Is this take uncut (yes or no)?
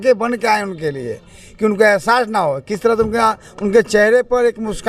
yes